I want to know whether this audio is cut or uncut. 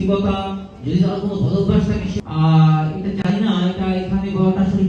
cut